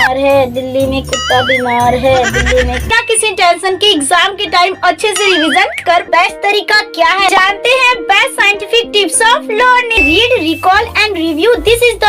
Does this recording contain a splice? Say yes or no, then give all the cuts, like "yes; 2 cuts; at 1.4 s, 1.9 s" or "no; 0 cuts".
yes; 3 cuts; at 2.9 s, 6.1 s, 9.9 s